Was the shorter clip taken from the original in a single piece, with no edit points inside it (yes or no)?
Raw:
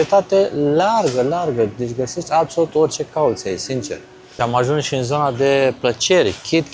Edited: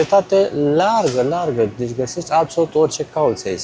yes